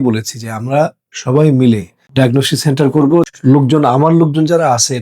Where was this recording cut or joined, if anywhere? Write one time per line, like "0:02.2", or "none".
0:02.0
0:03.3